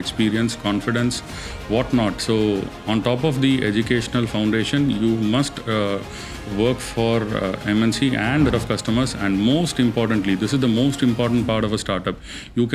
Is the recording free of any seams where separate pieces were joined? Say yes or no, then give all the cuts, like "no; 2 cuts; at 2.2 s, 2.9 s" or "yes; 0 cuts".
no; 1 cut; at 8.5 s